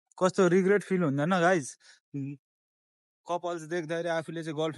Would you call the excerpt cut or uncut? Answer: uncut